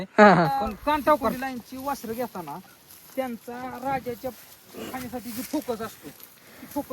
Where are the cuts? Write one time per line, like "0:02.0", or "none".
0:01.4

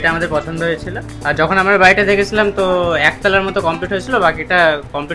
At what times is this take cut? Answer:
none

